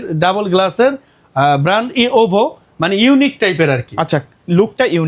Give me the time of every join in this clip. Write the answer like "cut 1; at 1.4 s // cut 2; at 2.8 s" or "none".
none